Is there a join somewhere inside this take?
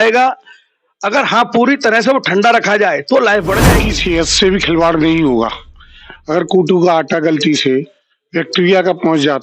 yes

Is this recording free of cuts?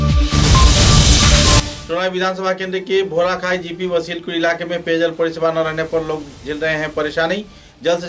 no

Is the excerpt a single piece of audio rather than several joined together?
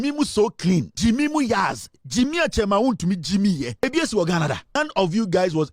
no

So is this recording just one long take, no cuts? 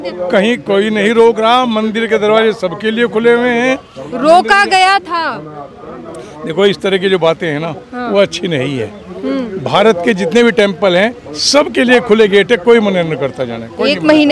yes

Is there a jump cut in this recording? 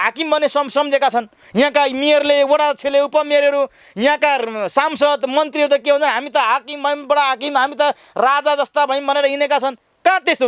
no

